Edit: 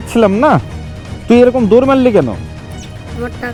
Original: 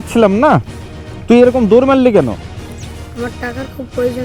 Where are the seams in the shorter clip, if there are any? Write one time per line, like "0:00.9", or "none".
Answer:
none